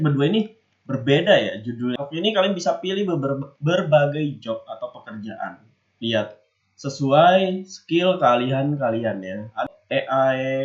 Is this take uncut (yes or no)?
no